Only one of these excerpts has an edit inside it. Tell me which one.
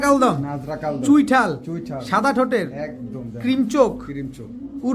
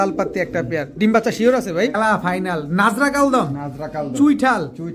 second; 1 cut; at 1.9 s

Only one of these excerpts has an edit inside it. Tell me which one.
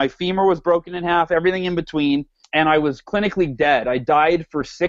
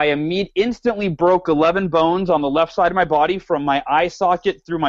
first; 1 cut; at 2.4 s

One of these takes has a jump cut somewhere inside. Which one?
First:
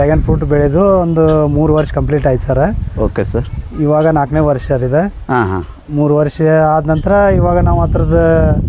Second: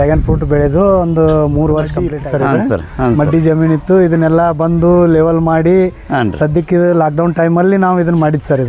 second; 1 cut; at 2.1 s

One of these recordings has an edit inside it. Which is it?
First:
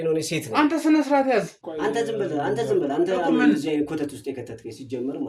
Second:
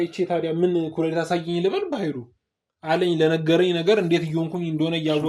first; 1 cut; at 1.6 s

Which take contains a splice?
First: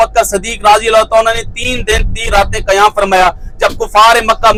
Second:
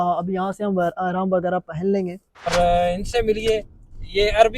second; 1 cut; at 2.5 s

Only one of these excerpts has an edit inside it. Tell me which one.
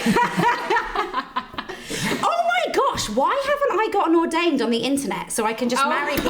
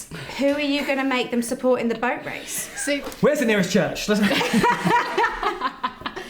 second; 1 cut; at 3.0 s

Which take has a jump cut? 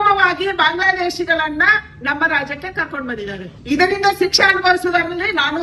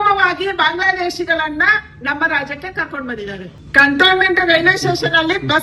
second; 1 cut; at 3.6 s

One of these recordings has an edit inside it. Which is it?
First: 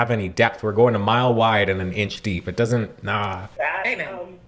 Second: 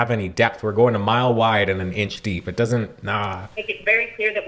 first; 1 cut; at 3.5 s

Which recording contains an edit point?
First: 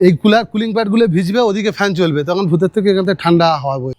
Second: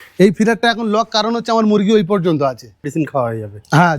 second; 1 cut; at 2.9 s

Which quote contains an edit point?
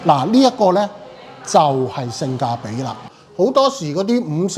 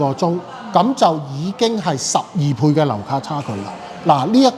first; 1 cut; at 3.1 s

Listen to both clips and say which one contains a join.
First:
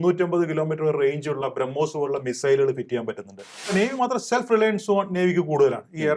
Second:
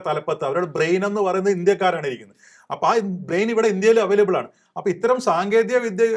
first; 1 cut; at 3.7 s

